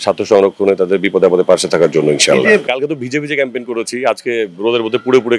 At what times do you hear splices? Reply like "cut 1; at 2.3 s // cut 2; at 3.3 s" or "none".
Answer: cut 1; at 2.7 s